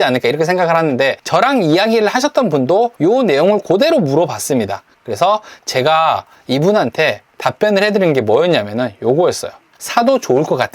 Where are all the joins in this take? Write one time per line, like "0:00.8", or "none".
0:01.2
0:02.9
0:09.6